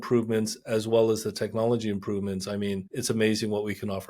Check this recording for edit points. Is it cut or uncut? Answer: cut